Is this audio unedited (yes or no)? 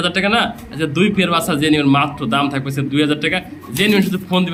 yes